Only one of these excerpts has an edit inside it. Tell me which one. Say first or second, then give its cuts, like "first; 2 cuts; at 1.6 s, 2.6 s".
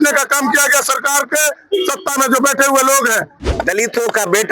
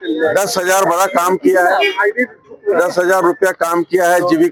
first; 1 cut; at 3.3 s